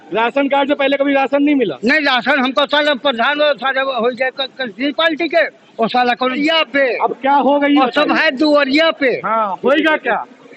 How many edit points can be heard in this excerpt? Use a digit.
1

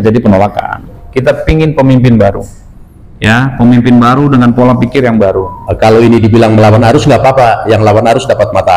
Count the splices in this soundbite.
2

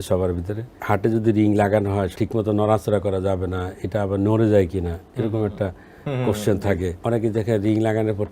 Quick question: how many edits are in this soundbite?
3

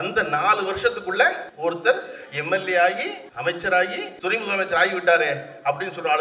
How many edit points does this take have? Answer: 3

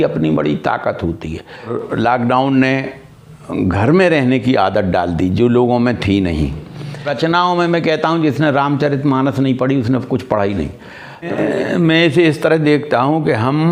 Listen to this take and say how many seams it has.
3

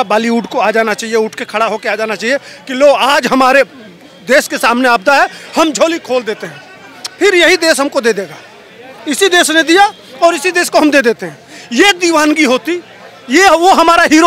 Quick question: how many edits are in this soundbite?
0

